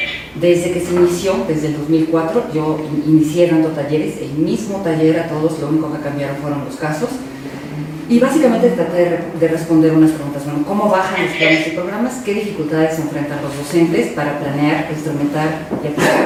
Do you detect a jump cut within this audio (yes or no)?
no